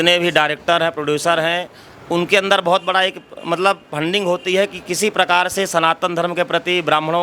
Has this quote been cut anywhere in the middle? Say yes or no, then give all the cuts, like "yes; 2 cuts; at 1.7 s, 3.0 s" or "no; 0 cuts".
no; 0 cuts